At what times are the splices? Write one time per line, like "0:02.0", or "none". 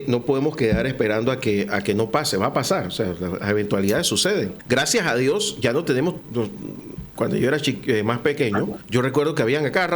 0:04.6
0:06.3
0:08.8